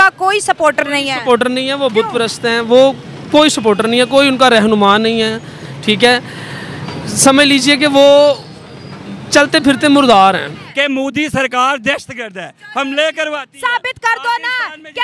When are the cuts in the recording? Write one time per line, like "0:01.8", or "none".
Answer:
0:10.6

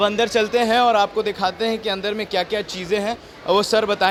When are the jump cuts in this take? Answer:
none

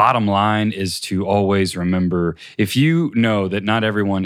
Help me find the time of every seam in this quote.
0:02.4

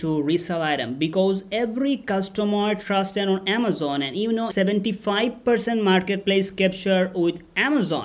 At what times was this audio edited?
0:04.5

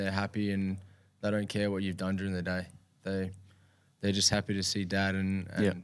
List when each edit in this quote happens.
none

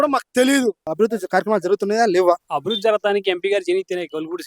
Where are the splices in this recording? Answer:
0:00.9
0:02.5

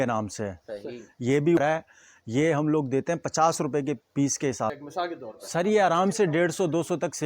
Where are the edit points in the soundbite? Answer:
0:01.6
0:04.8

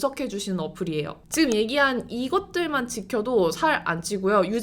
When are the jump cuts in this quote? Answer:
0:01.2

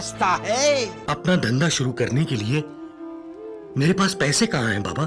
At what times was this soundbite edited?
0:01.0

